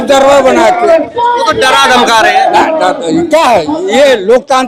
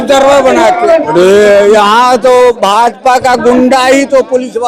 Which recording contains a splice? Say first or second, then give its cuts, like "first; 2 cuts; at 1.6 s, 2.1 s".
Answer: second; 1 cut; at 1.1 s